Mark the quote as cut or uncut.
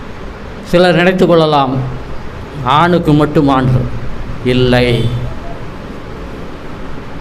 uncut